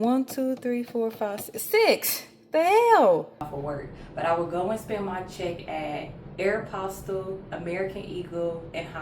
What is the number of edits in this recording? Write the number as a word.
one